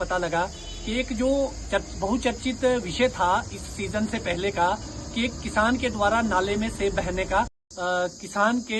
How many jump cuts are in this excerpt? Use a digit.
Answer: 1